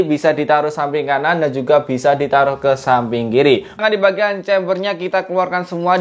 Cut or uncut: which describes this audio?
cut